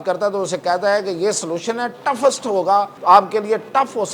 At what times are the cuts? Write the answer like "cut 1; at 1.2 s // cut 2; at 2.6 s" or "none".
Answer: cut 1; at 2.9 s